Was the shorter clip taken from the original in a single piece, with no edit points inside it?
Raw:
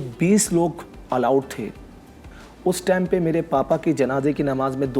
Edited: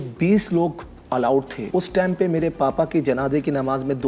no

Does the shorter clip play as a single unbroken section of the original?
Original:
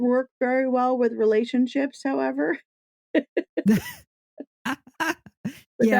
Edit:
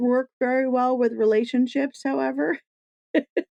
yes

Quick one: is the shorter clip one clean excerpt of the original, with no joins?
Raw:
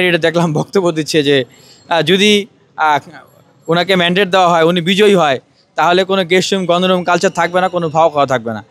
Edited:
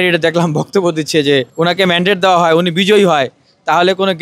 no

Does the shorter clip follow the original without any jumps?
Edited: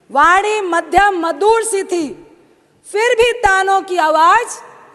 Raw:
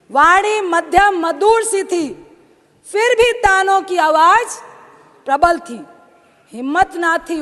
yes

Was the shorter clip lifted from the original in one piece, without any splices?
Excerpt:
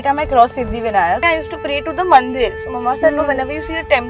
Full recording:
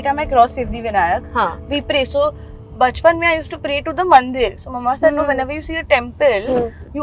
no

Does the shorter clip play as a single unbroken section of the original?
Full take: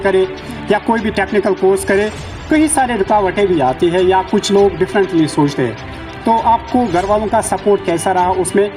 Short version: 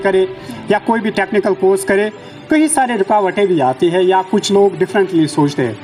yes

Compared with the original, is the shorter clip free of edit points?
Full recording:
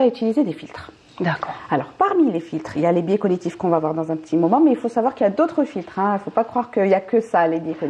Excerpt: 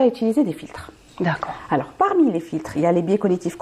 yes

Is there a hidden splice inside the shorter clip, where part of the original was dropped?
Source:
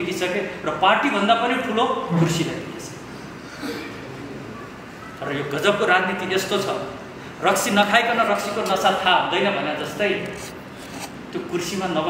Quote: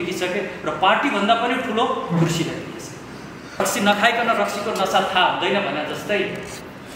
yes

